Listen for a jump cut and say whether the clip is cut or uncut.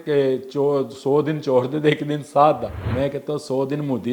cut